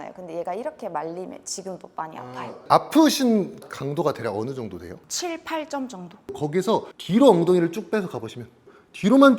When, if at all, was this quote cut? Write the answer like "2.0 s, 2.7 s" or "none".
2.6 s, 3.7 s, 5.0 s, 6.3 s